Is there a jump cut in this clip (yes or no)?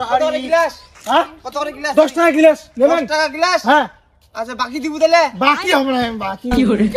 no